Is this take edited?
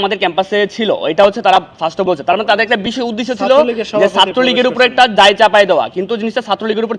no; 0 cuts

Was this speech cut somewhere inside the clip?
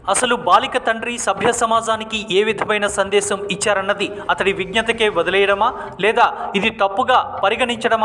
no; 0 cuts

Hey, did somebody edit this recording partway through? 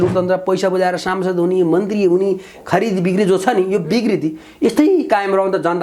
no; 0 cuts

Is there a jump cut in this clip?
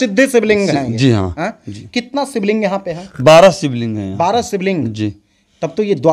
no; 0 cuts

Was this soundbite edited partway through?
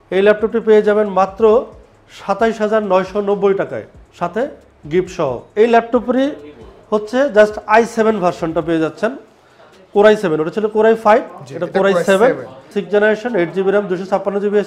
no; 0 cuts

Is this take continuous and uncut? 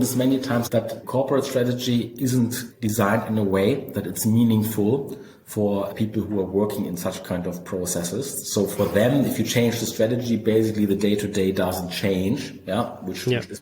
no; 3 cuts; at 0.8 s, 2.6 s, 5.9 s

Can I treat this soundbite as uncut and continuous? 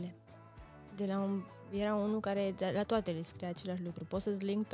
yes; 0 cuts

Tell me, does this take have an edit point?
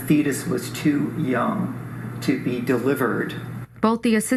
no; 0 cuts

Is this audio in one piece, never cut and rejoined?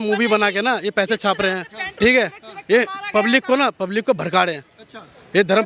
yes; 0 cuts

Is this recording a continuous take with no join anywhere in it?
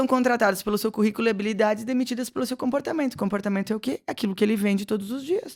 yes; 0 cuts

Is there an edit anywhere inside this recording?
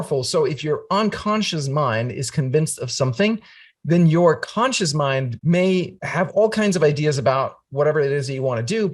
yes; 2 cuts; at 5.3 s, 6.0 s

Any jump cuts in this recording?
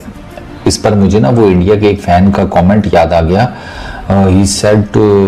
no; 0 cuts

